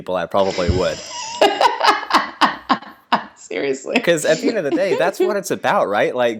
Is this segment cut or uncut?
uncut